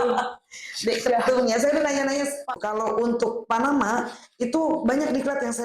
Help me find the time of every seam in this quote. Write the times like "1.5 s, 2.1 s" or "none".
2.5 s